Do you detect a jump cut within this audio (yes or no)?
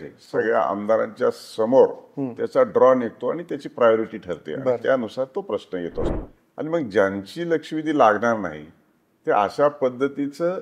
yes